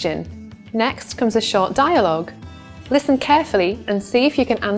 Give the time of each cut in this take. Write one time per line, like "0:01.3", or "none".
none